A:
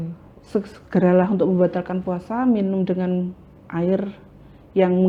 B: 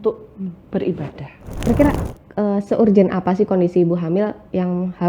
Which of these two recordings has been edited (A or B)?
B